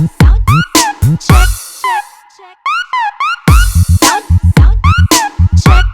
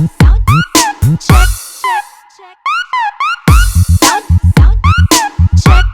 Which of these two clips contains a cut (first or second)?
first